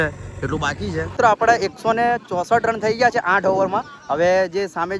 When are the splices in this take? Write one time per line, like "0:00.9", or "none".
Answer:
0:01.3